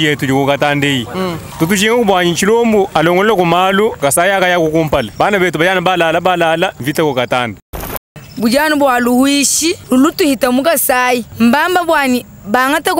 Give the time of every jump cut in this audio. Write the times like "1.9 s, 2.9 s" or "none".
1.4 s, 2.9 s, 4.0 s, 5.1 s, 6.8 s, 8.0 s, 9.8 s, 11.3 s